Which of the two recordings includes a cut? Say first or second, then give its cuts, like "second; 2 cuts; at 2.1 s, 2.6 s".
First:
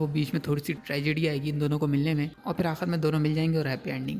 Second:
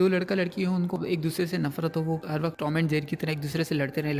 second; 1 cut; at 1.0 s